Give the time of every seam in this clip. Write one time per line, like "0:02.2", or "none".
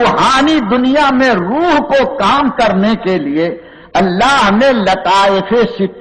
none